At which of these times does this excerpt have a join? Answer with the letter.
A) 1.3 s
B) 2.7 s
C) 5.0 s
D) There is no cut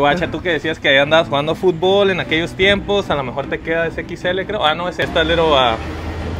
C